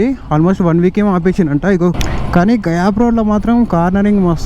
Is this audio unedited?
no; 1 cut; at 2.0 s

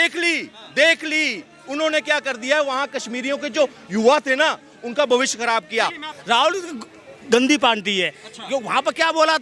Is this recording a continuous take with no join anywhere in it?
no; 1 cut; at 6.1 s

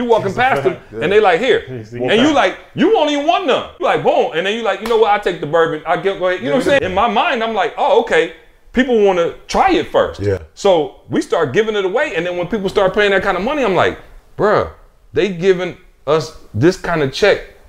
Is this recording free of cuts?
no; 2 cuts; at 3.8 s, 6.8 s

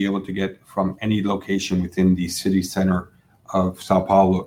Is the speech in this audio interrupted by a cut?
no; 0 cuts

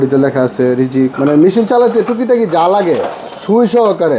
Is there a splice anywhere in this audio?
yes; 1 cut; at 1.1 s

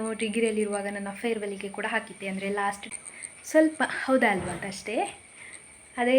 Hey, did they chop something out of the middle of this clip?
yes; 1 cut; at 2.9 s

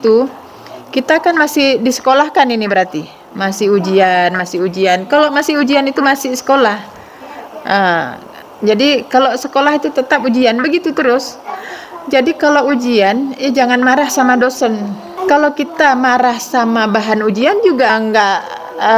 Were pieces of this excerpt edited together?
yes; 2 cuts; at 15.1 s, 17.9 s

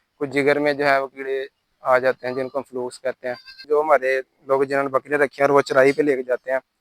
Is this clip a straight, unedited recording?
no; 1 cut; at 3.7 s

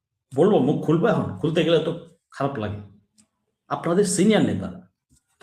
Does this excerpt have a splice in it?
no; 0 cuts

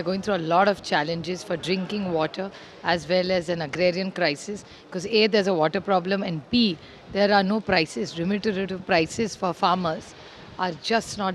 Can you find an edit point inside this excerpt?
no; 0 cuts

